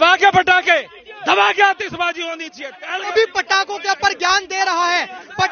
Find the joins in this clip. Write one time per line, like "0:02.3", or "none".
0:03.1